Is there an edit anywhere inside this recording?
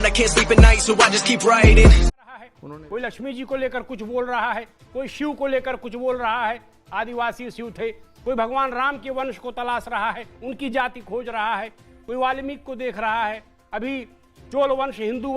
yes; 1 cut; at 2.3 s

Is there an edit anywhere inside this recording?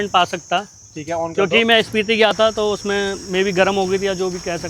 no; 0 cuts

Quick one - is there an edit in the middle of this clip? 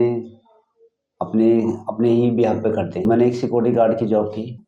yes; 1 cut; at 3.0 s

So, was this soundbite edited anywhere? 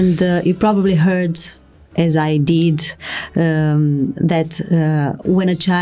no; 0 cuts

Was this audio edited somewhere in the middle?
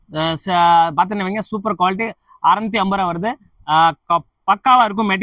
no; 0 cuts

